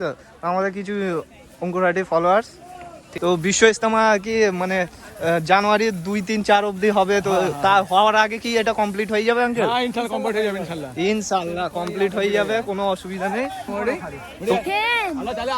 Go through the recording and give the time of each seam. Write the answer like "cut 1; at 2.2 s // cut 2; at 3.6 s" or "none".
cut 1; at 3.0 s // cut 2; at 13.7 s